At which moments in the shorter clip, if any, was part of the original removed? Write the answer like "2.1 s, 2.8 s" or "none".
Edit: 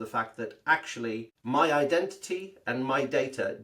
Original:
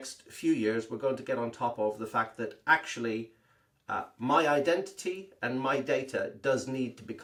1.4 s